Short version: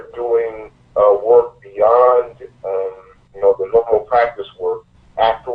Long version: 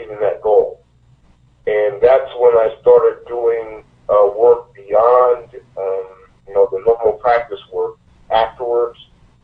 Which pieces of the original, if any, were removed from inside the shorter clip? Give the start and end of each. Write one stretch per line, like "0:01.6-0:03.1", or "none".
none